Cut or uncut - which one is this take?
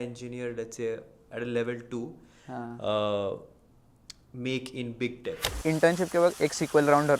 cut